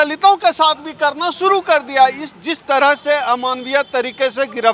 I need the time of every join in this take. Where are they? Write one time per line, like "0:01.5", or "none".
none